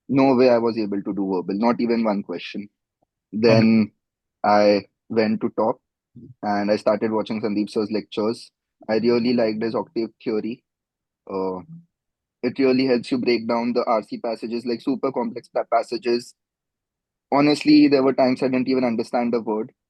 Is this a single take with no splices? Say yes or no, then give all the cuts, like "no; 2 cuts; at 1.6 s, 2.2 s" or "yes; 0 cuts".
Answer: yes; 0 cuts